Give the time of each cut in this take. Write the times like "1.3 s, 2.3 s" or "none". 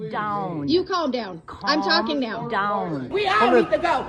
3.1 s